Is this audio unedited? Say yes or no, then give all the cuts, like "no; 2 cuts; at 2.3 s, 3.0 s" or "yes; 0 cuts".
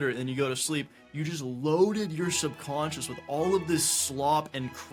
yes; 0 cuts